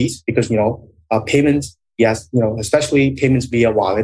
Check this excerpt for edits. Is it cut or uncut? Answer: uncut